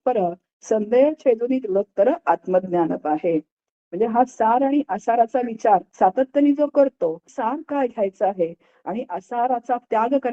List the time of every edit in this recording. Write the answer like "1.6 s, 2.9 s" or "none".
5.9 s, 7.3 s